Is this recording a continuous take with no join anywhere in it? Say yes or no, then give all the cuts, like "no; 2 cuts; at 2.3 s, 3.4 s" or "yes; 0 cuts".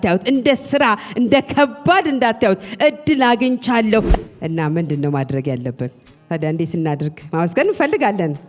no; 1 cut; at 4.1 s